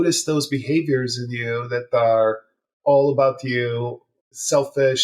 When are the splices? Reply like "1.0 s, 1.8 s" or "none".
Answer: 4.1 s